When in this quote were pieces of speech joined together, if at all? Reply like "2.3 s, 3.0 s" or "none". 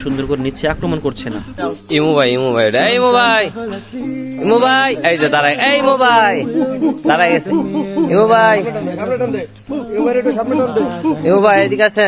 1.5 s